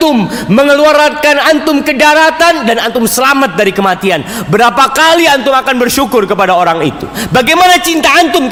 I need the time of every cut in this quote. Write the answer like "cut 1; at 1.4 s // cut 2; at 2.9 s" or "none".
none